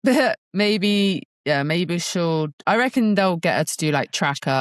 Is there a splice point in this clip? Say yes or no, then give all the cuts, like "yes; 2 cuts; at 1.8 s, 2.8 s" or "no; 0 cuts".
yes; 1 cut; at 1.3 s